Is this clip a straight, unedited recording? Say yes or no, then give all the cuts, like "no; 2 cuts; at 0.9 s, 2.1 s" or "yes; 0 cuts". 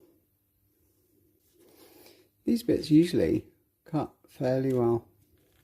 no; 1 cut; at 1.4 s